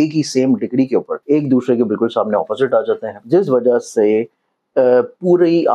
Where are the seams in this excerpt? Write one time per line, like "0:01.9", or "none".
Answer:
0:01.1
0:03.1